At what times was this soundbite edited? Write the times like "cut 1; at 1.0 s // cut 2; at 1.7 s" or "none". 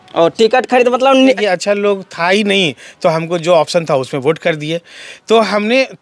cut 1; at 1.4 s